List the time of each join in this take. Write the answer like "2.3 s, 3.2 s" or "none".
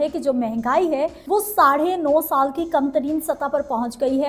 1.2 s